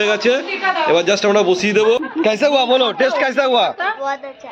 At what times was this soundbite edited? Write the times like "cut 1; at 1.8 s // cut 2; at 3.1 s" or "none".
cut 1; at 2.1 s